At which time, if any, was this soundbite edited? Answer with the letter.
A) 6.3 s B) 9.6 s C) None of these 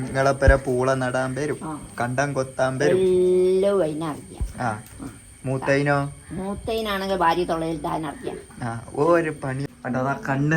B